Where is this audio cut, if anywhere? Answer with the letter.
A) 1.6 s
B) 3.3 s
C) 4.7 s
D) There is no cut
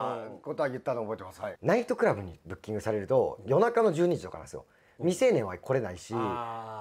A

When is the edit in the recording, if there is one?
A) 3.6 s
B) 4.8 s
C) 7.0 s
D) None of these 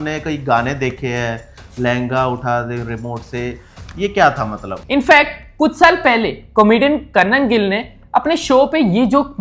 B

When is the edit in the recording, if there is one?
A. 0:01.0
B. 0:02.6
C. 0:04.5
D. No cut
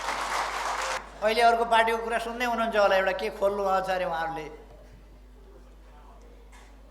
A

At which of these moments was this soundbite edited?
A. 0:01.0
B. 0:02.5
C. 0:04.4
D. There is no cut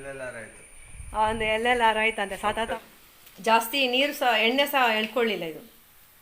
B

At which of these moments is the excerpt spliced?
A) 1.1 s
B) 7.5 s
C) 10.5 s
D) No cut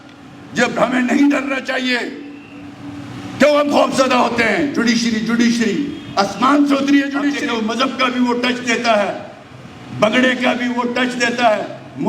B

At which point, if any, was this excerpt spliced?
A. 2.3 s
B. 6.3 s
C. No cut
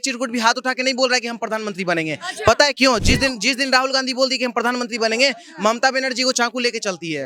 C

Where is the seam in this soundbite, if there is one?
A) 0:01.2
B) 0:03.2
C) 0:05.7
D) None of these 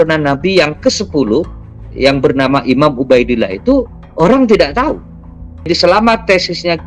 C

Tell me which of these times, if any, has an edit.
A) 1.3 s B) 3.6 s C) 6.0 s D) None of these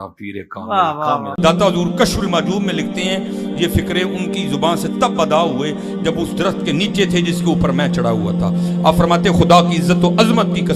A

